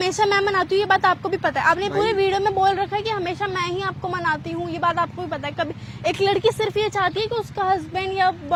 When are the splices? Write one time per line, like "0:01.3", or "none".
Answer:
none